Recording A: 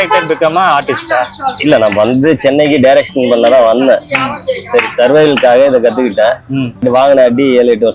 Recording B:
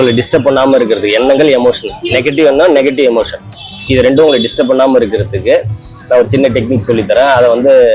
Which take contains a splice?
A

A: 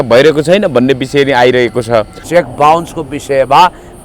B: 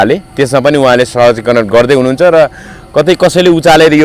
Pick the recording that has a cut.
A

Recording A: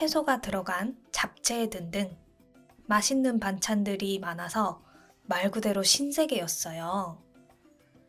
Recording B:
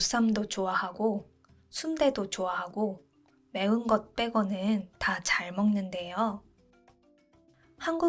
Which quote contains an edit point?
A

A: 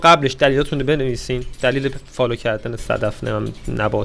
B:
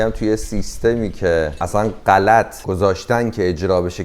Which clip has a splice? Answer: B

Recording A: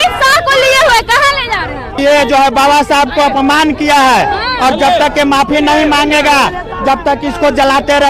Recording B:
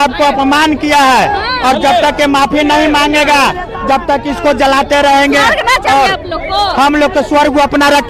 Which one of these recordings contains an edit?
A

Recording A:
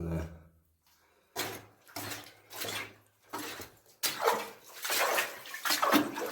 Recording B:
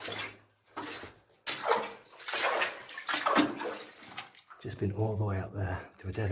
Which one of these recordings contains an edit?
A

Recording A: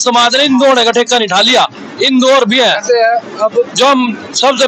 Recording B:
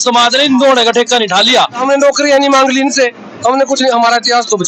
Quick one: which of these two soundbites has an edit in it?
B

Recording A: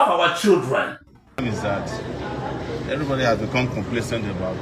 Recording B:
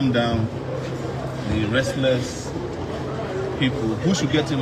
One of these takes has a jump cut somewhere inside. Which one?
A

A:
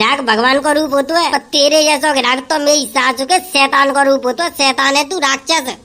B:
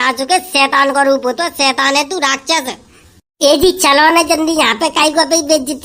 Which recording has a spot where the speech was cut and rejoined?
A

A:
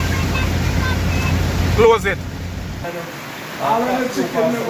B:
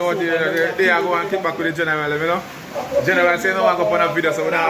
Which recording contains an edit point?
A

